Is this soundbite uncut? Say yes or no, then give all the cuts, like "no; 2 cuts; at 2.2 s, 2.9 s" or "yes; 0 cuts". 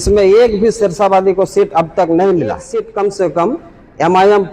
no; 1 cut; at 2.6 s